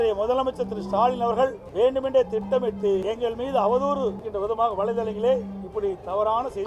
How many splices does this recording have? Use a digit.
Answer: 3